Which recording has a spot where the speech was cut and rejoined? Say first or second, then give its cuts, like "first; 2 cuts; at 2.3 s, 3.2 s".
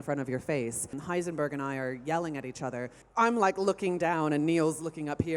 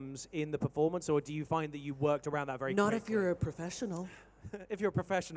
first; 2 cuts; at 1.0 s, 3.0 s